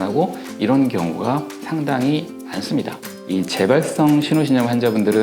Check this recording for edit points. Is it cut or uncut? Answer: cut